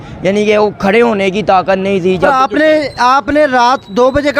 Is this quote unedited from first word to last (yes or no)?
no